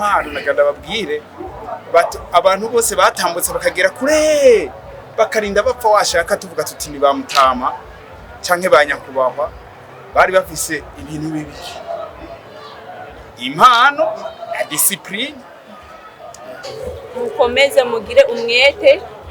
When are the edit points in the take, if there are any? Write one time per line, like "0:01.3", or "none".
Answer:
0:16.7